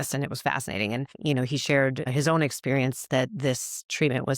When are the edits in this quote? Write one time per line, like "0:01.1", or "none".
0:01.1
0:02.1